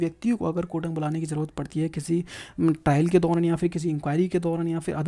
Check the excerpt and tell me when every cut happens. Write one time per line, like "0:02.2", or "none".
none